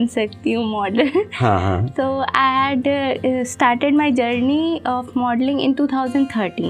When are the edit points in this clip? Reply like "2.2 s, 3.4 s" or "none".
none